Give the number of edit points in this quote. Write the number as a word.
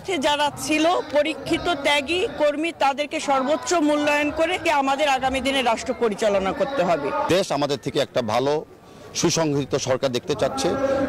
two